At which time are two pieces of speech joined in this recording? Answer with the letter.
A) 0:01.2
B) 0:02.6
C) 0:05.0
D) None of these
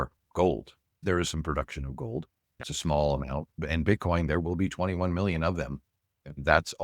B